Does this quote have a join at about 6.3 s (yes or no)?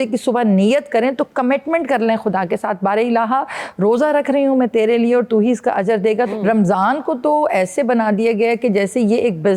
yes